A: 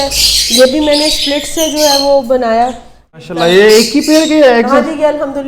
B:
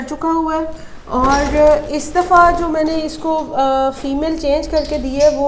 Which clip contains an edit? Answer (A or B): A